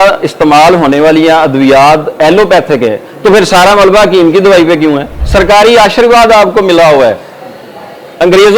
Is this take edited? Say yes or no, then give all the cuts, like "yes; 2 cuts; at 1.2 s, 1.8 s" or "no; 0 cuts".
yes; 1 cut; at 5.1 s